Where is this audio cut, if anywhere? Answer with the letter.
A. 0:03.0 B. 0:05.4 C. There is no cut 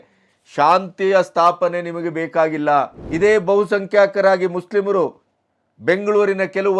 A